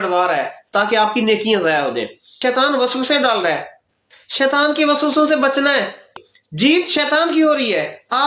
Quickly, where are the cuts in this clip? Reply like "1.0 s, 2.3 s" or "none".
2.2 s, 6.1 s